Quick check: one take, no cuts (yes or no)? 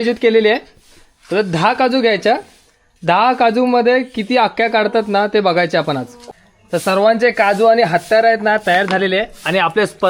no